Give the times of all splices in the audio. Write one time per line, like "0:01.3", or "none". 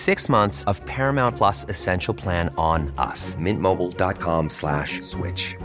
none